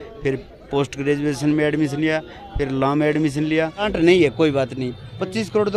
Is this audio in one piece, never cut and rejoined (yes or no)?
no